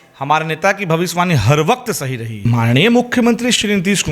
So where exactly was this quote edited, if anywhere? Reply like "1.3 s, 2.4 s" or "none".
2.4 s